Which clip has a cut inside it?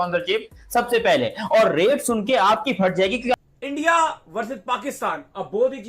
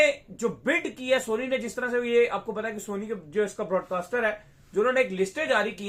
first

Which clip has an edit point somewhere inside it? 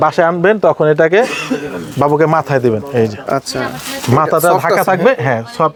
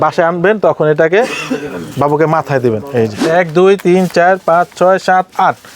second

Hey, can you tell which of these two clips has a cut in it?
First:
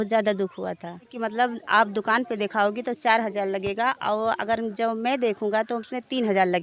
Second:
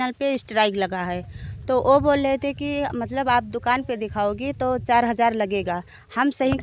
first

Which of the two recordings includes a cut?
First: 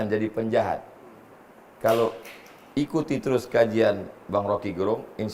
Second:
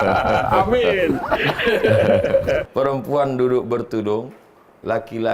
second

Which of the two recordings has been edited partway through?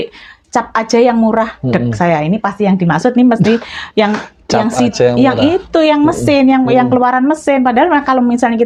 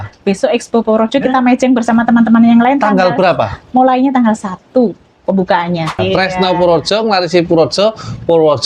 second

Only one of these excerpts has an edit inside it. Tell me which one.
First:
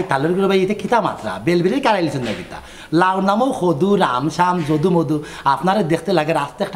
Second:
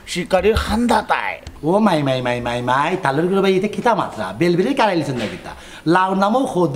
second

